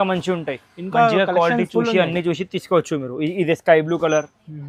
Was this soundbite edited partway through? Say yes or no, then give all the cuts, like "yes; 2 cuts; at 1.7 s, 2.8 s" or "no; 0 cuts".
no; 0 cuts